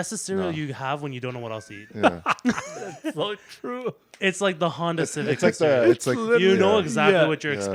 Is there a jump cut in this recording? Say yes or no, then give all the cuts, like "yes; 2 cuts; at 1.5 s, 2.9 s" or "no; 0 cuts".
no; 0 cuts